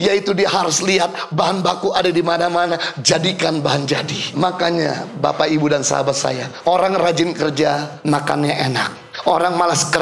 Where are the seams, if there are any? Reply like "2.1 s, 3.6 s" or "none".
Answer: 4.3 s, 6.5 s, 7.9 s, 9.0 s